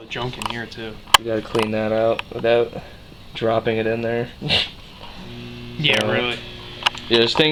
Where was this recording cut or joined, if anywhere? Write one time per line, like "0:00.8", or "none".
none